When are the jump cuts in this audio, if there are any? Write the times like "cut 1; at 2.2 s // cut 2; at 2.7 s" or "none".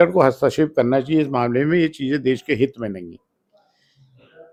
none

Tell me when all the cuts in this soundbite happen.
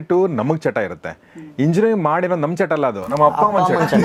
none

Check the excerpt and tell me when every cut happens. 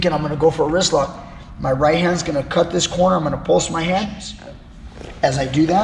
cut 1; at 4.2 s

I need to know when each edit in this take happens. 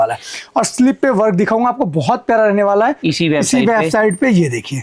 cut 1; at 3.0 s

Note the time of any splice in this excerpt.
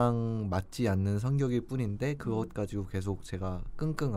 none

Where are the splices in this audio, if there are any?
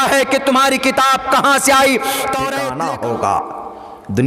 cut 1; at 2.6 s

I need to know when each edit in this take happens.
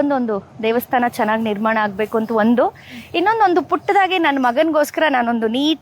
none

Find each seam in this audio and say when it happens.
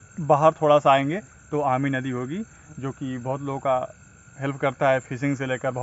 none

